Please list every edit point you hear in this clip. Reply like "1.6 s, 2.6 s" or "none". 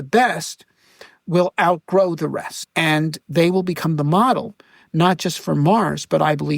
2.6 s